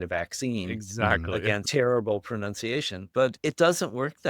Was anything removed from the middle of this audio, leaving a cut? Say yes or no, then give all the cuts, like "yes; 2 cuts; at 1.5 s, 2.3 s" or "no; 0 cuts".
yes; 2 cuts; at 1.6 s, 3.4 s